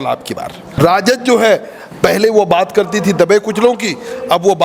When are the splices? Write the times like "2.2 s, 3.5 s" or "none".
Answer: 0.8 s, 1.8 s